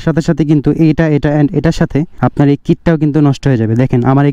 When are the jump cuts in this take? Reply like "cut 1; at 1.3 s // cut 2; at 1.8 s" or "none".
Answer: cut 1; at 2.1 s